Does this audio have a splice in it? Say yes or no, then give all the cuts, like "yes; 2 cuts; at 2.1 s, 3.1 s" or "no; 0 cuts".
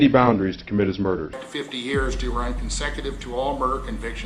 yes; 1 cut; at 1.5 s